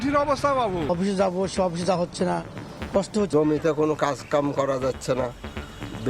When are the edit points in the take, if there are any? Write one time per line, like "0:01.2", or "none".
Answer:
0:00.9
0:03.3